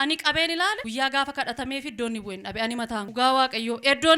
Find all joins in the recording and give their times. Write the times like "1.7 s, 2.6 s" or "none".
0.8 s, 3.1 s

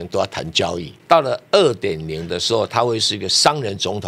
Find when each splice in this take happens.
0.9 s

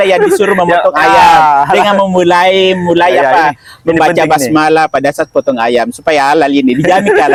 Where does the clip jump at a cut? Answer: none

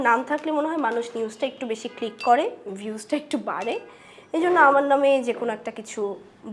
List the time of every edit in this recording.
none

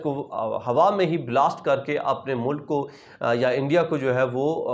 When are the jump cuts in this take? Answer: none

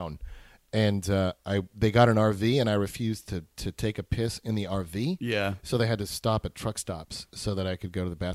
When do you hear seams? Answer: none

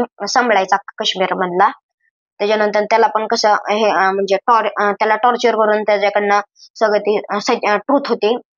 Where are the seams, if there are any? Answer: none

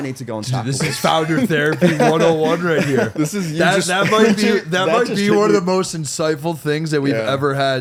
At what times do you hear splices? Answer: none

